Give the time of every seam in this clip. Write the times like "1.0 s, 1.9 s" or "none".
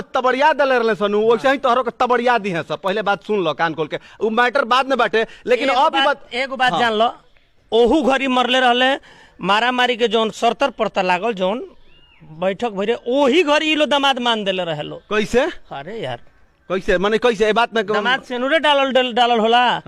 none